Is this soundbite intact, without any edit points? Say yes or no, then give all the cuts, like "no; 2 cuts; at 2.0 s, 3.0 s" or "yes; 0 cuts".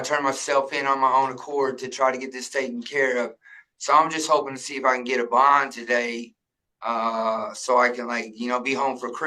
yes; 0 cuts